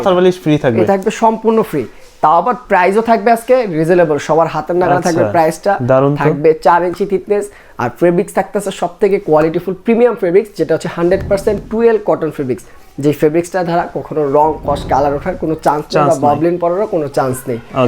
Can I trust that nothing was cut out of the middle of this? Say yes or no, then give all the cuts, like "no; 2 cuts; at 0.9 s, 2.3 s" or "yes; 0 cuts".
yes; 0 cuts